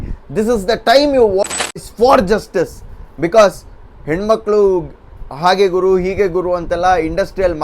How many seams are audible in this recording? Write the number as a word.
one